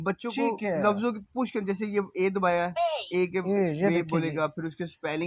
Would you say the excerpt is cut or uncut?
uncut